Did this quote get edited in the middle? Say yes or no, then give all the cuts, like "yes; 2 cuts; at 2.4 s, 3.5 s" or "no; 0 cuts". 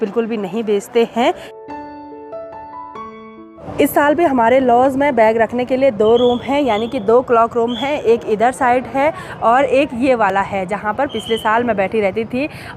no; 0 cuts